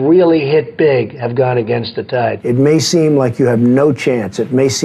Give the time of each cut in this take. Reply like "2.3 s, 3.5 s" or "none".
2.4 s